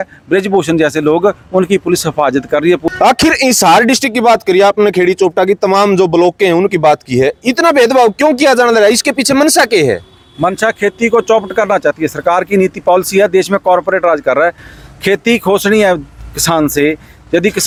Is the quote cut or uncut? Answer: uncut